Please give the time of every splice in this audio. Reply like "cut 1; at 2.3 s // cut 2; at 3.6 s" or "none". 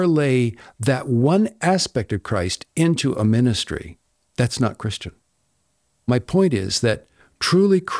cut 1; at 6.1 s